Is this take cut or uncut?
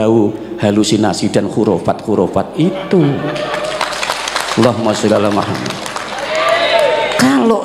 uncut